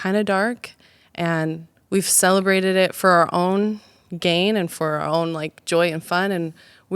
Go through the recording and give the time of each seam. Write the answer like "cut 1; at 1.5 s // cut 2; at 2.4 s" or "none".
cut 1; at 1.7 s